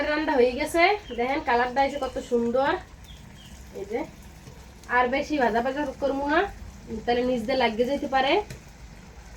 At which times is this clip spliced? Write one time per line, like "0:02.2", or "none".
none